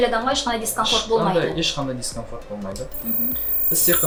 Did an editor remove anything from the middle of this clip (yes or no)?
no